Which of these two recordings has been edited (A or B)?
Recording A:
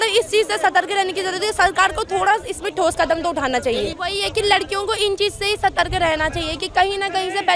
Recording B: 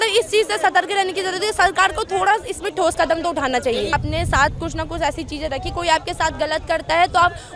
B